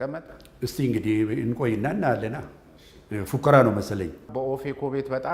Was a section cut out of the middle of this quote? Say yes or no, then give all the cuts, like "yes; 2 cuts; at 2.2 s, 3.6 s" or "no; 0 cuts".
yes; 1 cut; at 4.3 s